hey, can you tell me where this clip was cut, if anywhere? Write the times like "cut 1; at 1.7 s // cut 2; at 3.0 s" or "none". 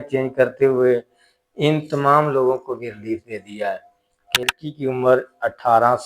cut 1; at 4.4 s

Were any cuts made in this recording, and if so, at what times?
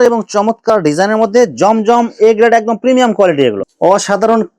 cut 1; at 3.6 s

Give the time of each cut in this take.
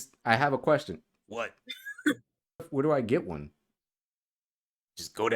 cut 1; at 2.7 s

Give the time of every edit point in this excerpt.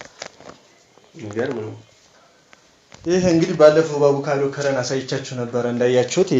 cut 1; at 3.1 s

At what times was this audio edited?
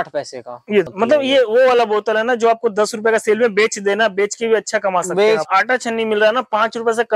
cut 1; at 0.9 s // cut 2; at 5.5 s

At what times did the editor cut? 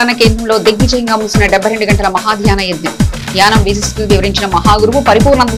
none

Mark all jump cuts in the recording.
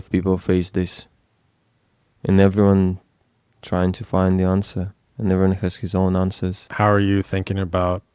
cut 1; at 6.6 s

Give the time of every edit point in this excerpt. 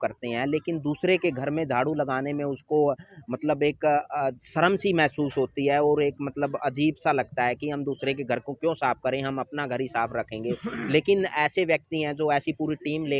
none

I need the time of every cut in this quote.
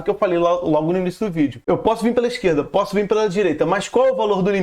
cut 1; at 1.6 s

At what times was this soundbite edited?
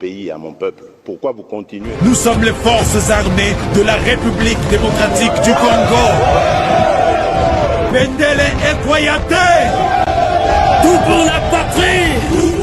cut 1; at 1.9 s

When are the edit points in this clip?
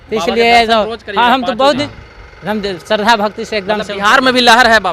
cut 1; at 1.8 s

